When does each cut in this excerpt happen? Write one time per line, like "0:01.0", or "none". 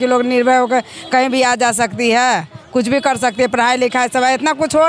none